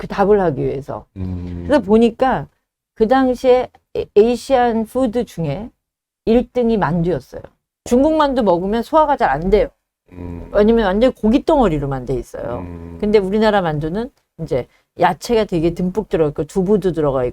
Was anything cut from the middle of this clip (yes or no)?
yes